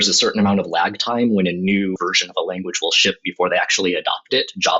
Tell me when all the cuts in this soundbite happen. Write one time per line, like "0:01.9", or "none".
0:02.0